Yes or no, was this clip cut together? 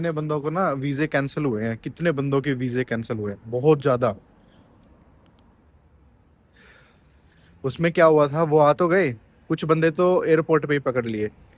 no